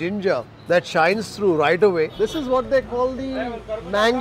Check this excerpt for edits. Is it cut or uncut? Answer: cut